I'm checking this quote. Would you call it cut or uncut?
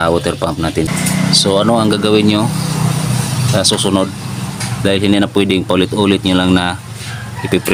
cut